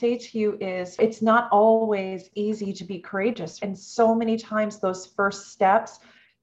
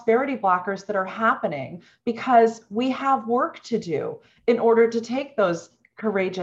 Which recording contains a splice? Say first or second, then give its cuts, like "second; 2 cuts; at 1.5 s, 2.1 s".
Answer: first; 2 cuts; at 1.0 s, 3.6 s